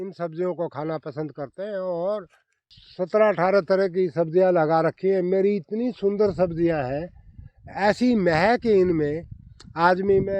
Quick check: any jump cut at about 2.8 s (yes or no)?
yes